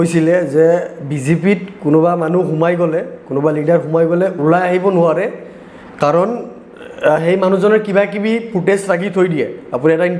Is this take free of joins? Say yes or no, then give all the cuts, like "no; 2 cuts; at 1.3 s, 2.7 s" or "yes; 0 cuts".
yes; 0 cuts